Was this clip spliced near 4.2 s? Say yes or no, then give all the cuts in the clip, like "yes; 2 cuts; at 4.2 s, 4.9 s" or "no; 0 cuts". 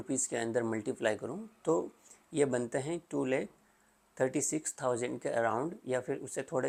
no; 0 cuts